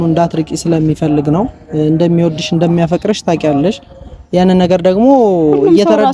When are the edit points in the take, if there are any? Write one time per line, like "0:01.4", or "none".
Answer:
none

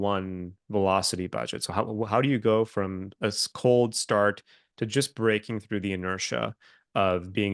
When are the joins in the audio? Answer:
none

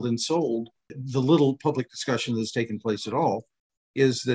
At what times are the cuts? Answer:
none

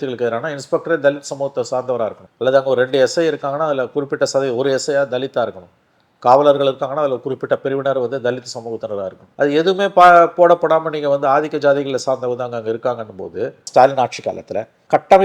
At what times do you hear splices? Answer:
0:13.6

